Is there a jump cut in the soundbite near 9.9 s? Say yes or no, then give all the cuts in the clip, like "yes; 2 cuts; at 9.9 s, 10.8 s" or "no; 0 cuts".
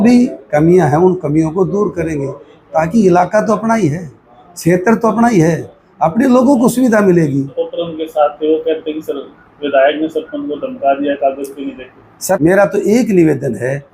no; 2 cuts; at 7.6 s, 12.4 s